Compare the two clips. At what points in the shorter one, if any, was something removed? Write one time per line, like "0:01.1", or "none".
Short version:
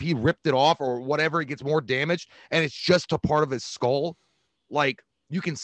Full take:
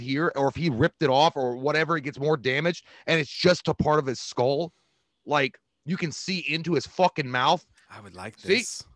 none